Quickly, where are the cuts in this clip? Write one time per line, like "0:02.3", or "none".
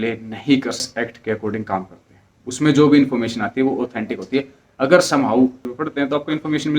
0:01.0
0:05.7